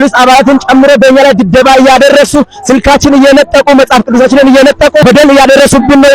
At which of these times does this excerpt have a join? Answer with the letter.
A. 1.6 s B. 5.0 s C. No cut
B